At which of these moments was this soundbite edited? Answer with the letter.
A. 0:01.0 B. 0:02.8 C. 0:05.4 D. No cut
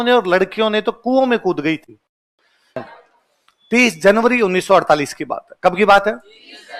B